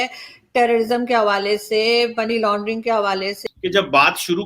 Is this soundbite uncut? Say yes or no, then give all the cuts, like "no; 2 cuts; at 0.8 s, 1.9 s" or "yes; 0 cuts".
no; 1 cut; at 3.4 s